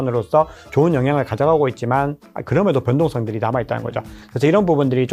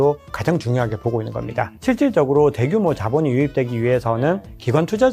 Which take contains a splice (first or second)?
second